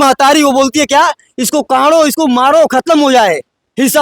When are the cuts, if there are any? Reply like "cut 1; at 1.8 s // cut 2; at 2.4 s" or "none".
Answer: none